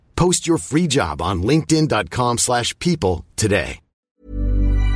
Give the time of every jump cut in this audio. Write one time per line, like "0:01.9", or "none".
0:03.9